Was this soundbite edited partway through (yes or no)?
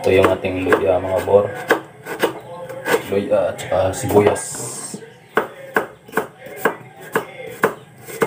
no